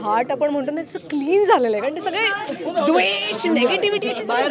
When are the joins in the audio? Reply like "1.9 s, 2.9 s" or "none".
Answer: none